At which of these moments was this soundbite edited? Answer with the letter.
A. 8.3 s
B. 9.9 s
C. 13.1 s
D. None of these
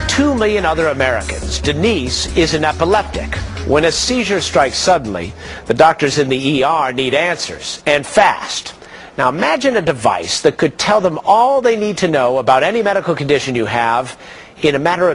A